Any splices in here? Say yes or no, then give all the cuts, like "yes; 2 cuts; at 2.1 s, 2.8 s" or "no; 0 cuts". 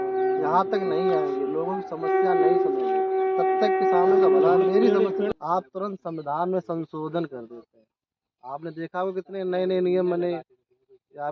yes; 1 cut; at 5.3 s